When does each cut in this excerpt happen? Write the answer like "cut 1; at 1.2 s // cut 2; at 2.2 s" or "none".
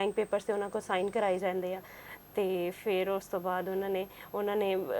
none